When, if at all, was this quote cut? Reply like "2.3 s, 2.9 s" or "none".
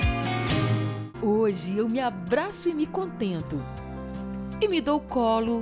1.0 s